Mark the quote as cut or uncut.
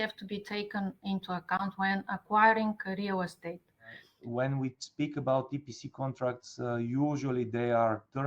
cut